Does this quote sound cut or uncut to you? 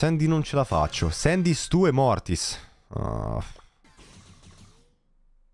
cut